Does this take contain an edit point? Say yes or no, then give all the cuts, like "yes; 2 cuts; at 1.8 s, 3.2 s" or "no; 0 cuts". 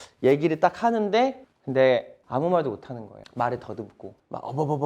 yes; 1 cut; at 1.4 s